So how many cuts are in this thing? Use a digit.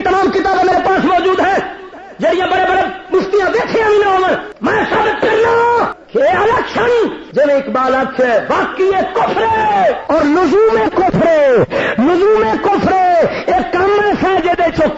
4